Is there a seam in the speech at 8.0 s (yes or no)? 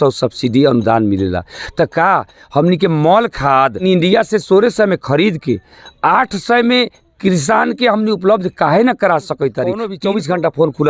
no